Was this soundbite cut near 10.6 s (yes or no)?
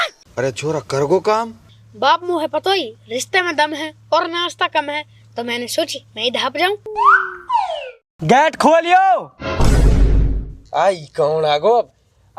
no